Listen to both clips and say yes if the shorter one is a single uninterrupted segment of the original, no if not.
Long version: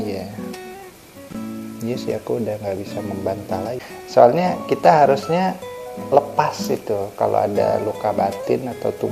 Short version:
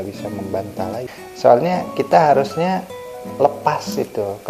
yes